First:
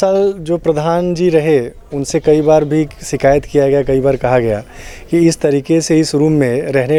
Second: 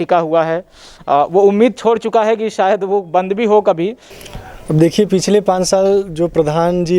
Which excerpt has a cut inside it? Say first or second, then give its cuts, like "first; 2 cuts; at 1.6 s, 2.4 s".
second; 1 cut; at 4.0 s